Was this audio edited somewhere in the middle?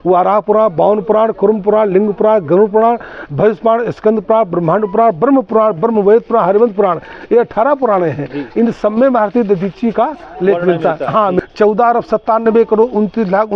yes; 1 cut; at 11.4 s

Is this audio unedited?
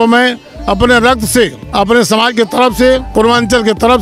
no; 2 cuts; at 1.6 s, 3.1 s

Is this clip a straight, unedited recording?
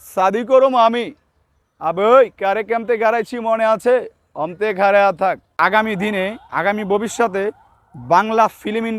no; 1 cut; at 5.6 s

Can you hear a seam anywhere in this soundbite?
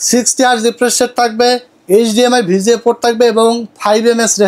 no; 0 cuts

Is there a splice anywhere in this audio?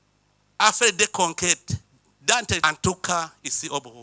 yes; 1 cut; at 2.6 s

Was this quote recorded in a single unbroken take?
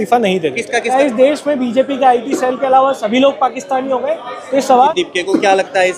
no; 2 cuts; at 0.9 s, 4.9 s

